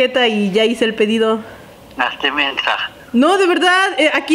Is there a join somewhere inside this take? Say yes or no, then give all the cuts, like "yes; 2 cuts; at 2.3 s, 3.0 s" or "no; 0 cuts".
no; 0 cuts